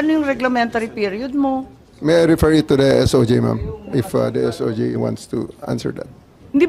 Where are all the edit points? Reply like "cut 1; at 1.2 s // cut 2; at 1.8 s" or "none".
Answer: cut 1; at 1.8 s